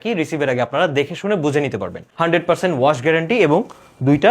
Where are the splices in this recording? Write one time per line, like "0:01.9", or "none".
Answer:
0:02.0

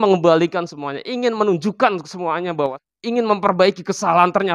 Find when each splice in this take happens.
0:02.8

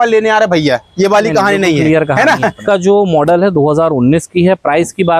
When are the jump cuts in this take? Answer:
0:02.6

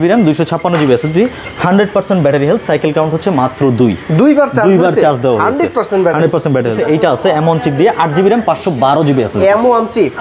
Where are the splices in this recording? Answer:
0:06.8

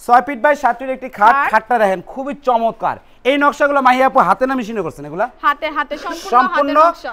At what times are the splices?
none

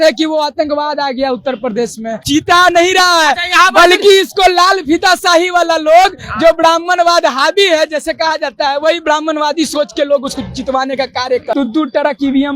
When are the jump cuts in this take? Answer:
0:02.2
0:11.5

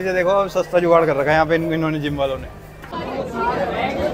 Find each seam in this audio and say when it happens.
0:03.0

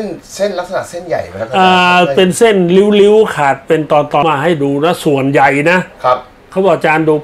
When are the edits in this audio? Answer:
0:04.2

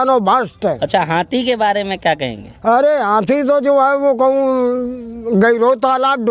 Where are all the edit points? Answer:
none

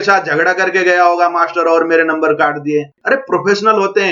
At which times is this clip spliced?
0:02.9

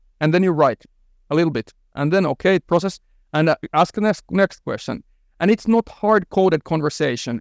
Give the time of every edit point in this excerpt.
none

